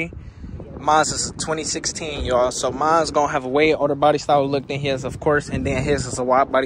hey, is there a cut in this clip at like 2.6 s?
no; 0 cuts

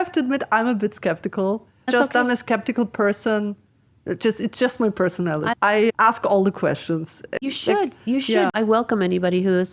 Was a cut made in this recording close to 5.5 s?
yes; 4 cuts; at 1.9 s, 5.5 s, 7.4 s, 8.5 s

